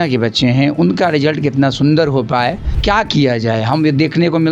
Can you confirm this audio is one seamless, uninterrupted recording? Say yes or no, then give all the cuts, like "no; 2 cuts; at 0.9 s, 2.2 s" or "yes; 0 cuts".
no; 1 cut; at 2.7 s